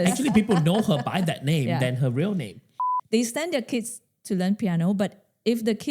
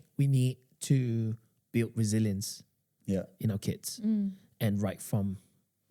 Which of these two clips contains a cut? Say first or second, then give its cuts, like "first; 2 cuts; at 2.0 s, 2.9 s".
first; 1 cut; at 2.9 s